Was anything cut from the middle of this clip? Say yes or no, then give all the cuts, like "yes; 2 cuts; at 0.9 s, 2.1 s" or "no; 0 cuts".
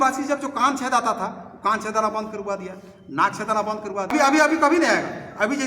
yes; 1 cut; at 4.1 s